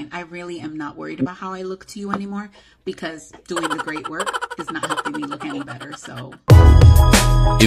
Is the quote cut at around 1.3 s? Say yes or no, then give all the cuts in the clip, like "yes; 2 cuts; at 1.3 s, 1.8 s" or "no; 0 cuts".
no; 1 cut; at 6.5 s